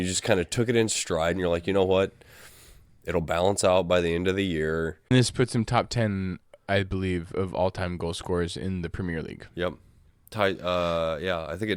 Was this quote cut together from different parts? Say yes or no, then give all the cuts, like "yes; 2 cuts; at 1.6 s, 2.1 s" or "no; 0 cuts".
yes; 1 cut; at 5.1 s